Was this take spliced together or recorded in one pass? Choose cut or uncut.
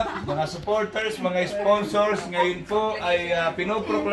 uncut